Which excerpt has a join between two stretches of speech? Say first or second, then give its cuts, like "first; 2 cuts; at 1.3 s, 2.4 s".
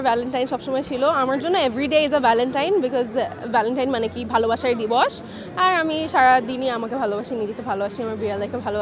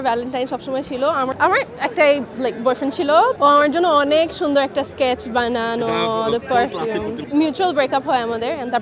second; 3 cuts; at 1.3 s, 3.3 s, 7.2 s